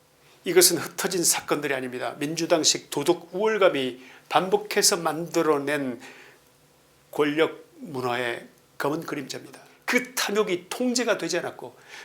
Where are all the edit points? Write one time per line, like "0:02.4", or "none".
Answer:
0:09.7